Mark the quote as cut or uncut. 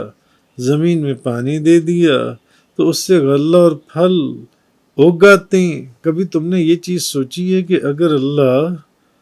cut